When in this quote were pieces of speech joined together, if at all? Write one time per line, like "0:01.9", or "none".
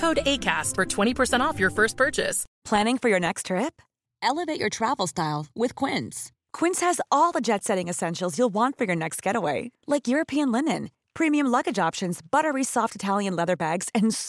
0:02.4